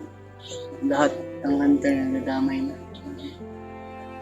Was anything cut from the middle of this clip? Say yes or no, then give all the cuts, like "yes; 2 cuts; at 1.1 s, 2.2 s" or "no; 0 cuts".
yes; 1 cut; at 3.3 s